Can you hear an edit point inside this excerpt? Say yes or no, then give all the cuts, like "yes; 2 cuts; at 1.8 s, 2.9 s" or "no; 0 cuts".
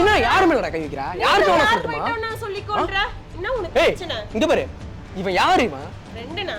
yes; 1 cut; at 1.0 s